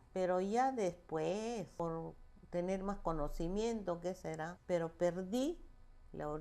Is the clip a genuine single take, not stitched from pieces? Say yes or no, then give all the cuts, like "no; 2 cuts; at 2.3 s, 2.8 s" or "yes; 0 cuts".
no; 2 cuts; at 1.7 s, 4.5 s